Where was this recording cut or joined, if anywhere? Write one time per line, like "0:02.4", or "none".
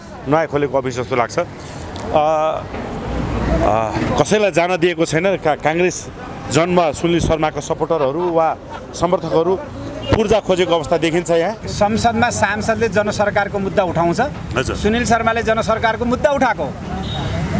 0:11.6